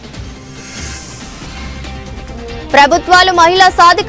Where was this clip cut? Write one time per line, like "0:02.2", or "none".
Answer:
0:01.3
0:02.7